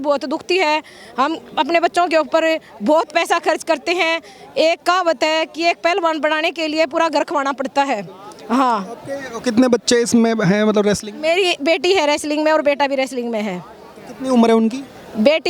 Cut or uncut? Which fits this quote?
uncut